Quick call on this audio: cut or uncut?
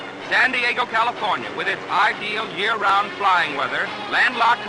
cut